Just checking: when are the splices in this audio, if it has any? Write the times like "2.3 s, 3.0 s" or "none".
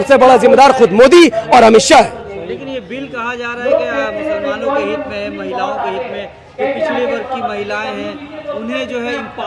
none